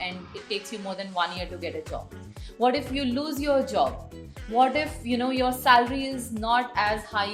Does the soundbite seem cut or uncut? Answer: uncut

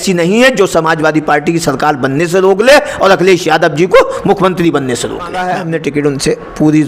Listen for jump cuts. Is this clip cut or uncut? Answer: cut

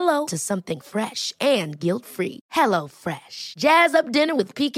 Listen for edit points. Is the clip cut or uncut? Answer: uncut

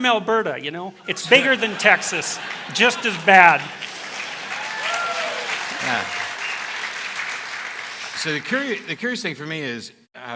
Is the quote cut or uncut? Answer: uncut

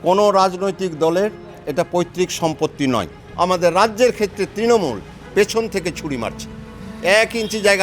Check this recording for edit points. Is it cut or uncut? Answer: cut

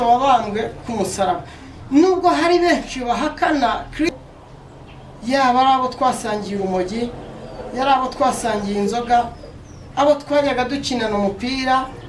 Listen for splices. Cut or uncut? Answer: cut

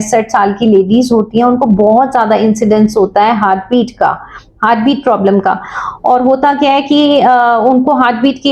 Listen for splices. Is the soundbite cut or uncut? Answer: uncut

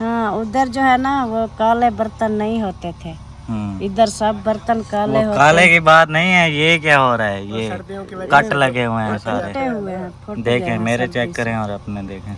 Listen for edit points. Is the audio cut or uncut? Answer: uncut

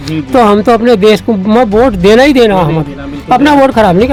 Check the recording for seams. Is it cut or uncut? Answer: uncut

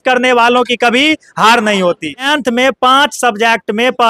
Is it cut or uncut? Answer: cut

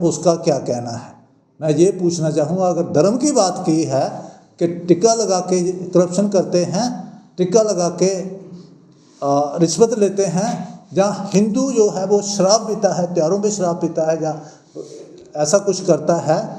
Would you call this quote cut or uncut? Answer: uncut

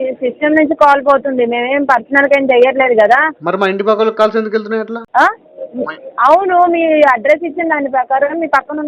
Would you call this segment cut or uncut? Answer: uncut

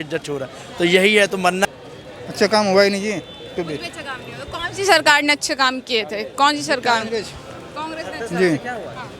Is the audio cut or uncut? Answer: cut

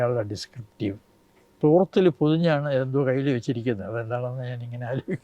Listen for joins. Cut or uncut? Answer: cut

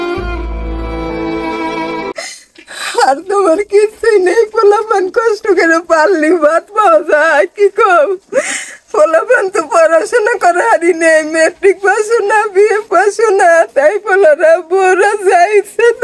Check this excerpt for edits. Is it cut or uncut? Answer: cut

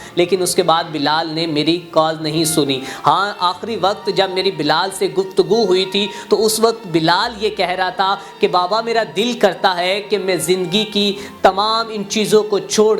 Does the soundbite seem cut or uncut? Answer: uncut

